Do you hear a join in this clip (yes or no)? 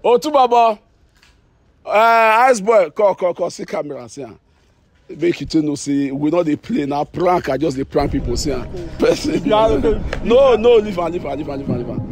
yes